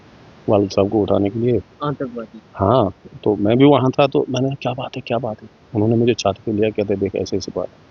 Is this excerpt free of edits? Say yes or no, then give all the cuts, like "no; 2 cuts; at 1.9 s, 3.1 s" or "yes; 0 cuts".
yes; 0 cuts